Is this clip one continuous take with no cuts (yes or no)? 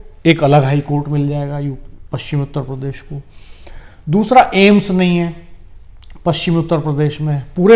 yes